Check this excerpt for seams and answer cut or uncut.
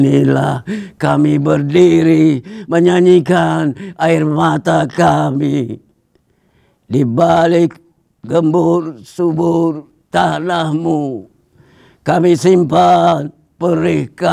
uncut